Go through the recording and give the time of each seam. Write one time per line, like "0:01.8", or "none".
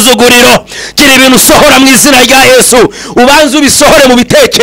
none